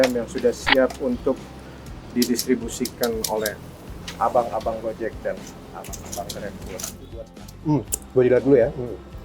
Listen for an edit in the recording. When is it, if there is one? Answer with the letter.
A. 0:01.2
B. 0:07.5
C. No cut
B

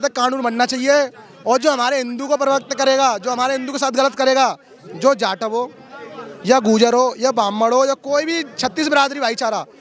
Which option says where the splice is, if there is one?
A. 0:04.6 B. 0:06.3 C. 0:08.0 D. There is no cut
D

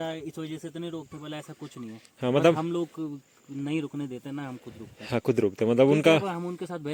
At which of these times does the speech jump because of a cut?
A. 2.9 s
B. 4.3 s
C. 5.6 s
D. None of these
D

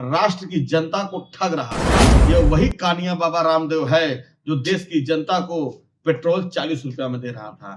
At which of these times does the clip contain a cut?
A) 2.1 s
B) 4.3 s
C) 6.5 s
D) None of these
A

